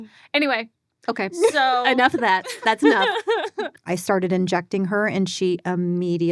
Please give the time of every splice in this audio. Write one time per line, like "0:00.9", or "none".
0:03.7